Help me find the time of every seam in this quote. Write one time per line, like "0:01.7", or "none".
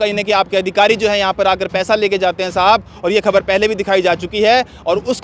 none